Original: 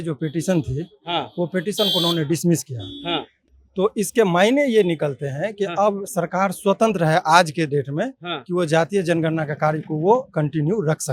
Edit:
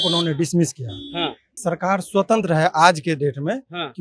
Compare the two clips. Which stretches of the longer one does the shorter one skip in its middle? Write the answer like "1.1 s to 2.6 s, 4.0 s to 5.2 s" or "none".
3.4 s to 6.0 s